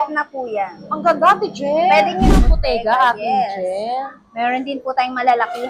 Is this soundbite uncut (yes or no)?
no